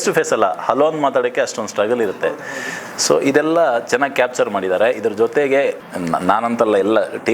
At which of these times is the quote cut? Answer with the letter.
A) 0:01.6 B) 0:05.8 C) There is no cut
B